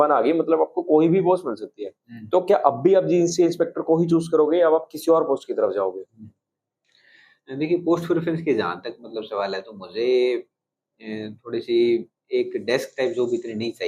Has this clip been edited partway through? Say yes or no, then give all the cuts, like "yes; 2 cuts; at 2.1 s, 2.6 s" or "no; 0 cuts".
no; 0 cuts